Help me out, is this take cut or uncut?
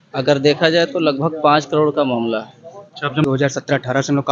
cut